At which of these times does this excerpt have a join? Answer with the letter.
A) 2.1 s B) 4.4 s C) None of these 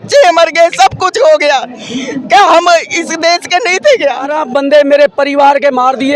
B